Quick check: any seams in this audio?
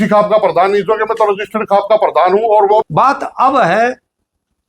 yes; 1 cut; at 2.9 s

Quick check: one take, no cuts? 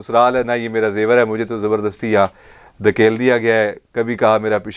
yes; 0 cuts

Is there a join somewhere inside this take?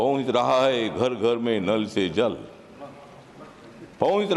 no; 0 cuts

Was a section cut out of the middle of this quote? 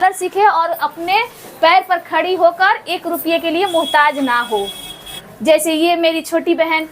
yes; 1 cut; at 5.2 s

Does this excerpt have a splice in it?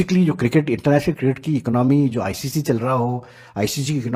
no; 0 cuts

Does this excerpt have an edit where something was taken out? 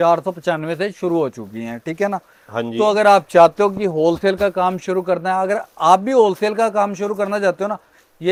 no; 0 cuts

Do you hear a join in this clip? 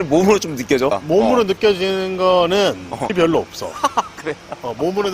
yes; 2 cuts; at 1.0 s, 3.1 s

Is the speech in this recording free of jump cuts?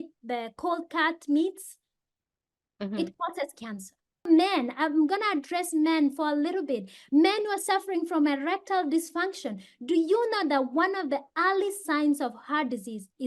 no; 1 cut; at 4.2 s

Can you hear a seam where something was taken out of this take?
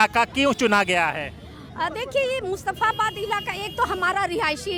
no; 0 cuts

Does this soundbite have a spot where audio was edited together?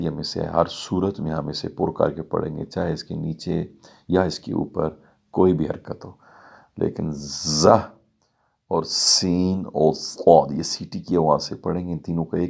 no; 0 cuts

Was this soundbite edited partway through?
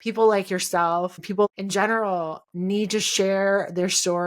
yes; 1 cut; at 1.4 s

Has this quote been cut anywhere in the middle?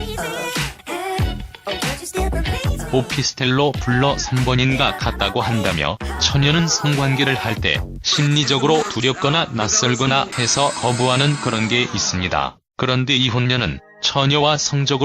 no; 0 cuts

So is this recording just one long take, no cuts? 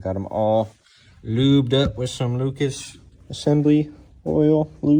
yes; 0 cuts

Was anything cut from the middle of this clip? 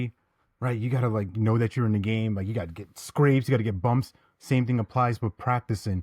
no; 0 cuts

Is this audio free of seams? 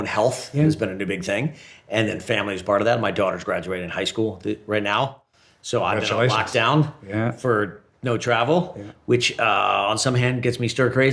yes; 0 cuts

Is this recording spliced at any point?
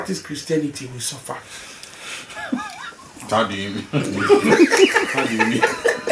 no; 0 cuts

